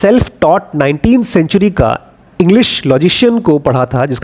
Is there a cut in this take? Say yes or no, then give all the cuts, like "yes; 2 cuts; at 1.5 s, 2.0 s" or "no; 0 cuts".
no; 0 cuts